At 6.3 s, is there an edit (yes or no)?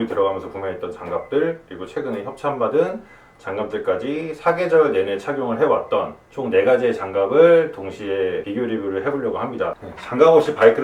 no